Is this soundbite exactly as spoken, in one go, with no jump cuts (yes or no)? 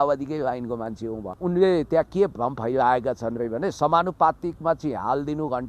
no